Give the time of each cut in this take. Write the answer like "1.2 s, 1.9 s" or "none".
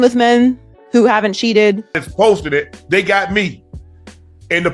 2.0 s